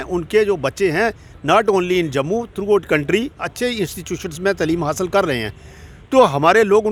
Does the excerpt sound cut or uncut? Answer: uncut